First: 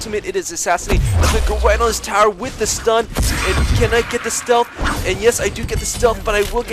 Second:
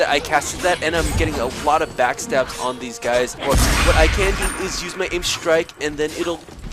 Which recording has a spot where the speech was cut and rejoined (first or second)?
second